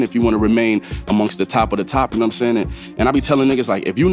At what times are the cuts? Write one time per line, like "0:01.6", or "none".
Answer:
0:02.1